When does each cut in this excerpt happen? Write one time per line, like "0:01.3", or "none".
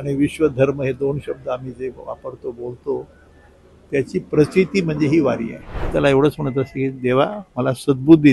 0:05.9